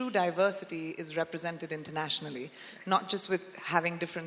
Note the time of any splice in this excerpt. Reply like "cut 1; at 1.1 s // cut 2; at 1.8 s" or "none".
none